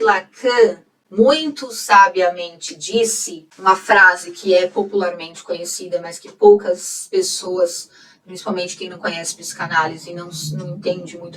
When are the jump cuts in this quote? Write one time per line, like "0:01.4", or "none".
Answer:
none